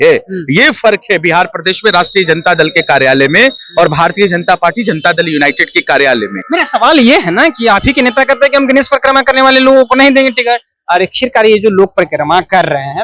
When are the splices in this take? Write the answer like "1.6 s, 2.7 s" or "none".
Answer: none